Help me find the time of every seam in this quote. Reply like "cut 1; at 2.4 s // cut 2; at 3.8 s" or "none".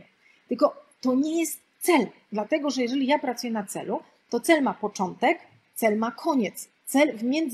none